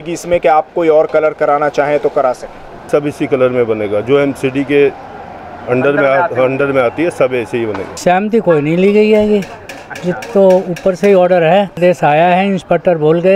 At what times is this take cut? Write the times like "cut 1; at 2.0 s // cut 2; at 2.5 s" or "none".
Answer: cut 1; at 2.9 s // cut 2; at 8.0 s // cut 3; at 11.8 s